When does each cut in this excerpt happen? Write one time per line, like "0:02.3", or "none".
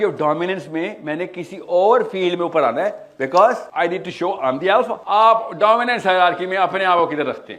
0:03.6
0:05.0